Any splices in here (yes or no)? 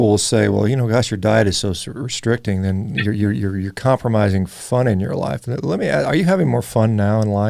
no